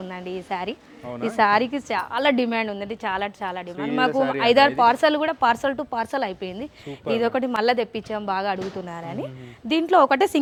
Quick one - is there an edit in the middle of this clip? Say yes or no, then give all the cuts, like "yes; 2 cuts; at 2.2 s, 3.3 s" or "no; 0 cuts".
no; 0 cuts